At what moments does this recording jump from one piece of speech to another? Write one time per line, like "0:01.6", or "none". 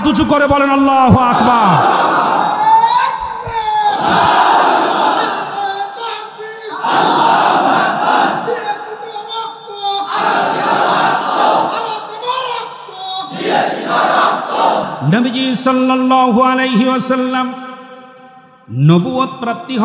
0:14.9